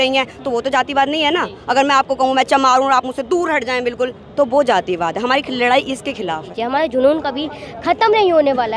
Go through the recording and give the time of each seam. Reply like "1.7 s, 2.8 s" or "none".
6.5 s